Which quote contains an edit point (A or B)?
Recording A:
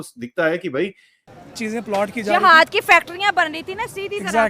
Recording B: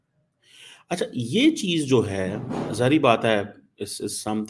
A